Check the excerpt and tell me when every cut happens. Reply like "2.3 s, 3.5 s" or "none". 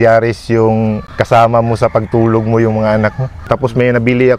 1.1 s, 3.5 s